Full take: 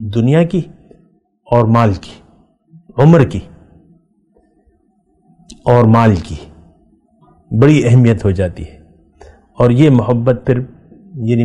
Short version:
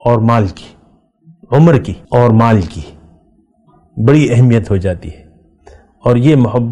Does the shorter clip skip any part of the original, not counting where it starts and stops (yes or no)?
yes